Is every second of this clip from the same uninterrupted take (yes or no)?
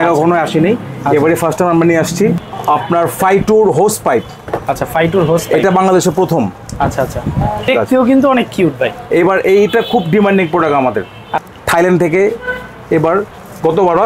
no